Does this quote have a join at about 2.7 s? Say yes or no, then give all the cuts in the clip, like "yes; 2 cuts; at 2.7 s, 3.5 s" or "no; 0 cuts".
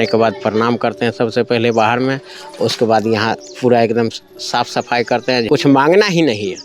no; 1 cut; at 5.5 s